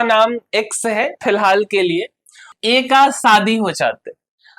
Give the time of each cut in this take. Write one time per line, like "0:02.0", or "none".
0:02.5